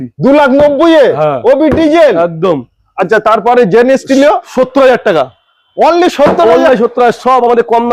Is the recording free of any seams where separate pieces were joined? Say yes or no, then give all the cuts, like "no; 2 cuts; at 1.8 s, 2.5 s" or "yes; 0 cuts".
yes; 0 cuts